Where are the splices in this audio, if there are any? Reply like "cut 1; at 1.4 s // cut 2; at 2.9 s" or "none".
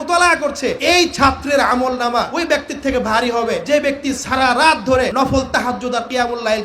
cut 1; at 0.8 s // cut 2; at 2.3 s // cut 3; at 3.6 s // cut 4; at 5.1 s